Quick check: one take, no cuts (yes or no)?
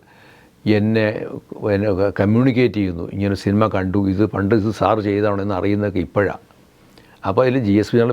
yes